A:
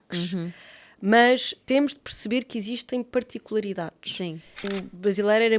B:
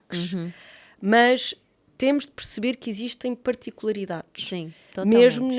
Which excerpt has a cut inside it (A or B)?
A